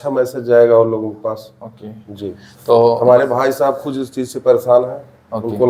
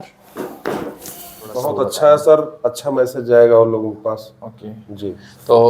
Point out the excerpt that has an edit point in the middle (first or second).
second